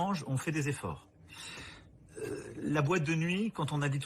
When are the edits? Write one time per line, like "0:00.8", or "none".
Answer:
0:01.5